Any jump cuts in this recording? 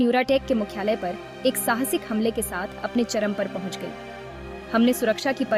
no; 0 cuts

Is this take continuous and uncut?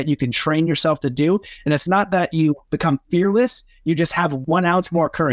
no; 1 cut; at 4.4 s

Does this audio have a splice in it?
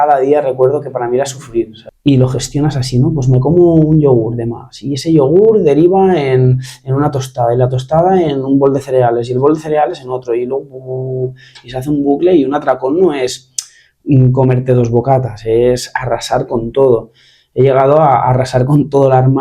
yes; 1 cut; at 1.8 s

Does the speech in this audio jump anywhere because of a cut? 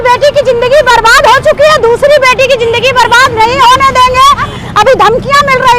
yes; 1 cut; at 4.5 s

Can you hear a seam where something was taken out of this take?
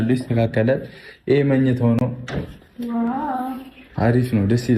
no; 0 cuts

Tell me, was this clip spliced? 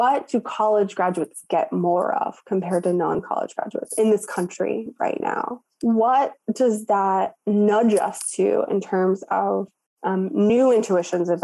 yes; 1 cut; at 5.7 s

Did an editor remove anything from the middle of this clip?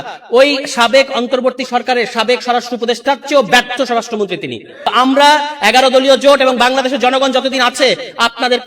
yes; 1 cut; at 4.8 s

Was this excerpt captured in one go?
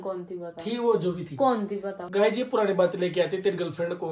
no; 1 cut; at 2.0 s

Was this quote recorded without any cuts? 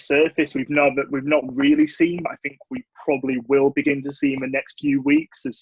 yes; 0 cuts

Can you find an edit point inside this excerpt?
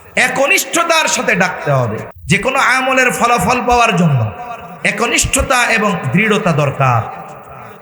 yes; 1 cut; at 2.0 s

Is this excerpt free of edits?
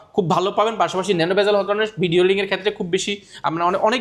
yes; 0 cuts

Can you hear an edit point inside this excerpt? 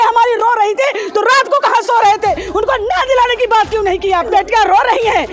yes; 1 cut; at 4.3 s

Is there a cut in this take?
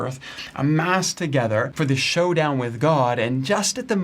yes; 1 cut; at 1.7 s

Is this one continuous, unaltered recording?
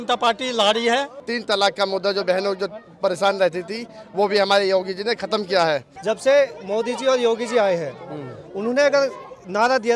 no; 2 cuts; at 1.3 s, 5.9 s

